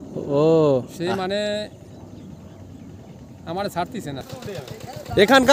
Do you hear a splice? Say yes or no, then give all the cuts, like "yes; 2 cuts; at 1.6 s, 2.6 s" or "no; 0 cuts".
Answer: yes; 1 cut; at 4.2 s